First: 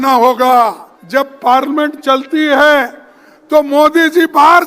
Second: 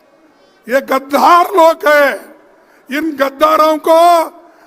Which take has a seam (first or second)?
first